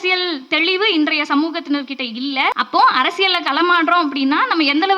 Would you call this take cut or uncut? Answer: cut